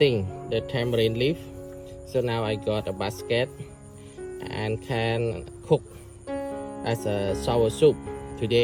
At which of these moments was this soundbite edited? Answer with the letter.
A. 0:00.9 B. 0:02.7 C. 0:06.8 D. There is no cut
D